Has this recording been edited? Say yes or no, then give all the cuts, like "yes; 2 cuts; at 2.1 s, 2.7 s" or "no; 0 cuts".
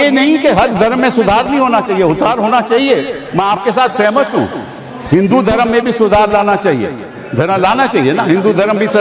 no; 0 cuts